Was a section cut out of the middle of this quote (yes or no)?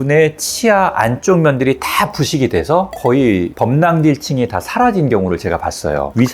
no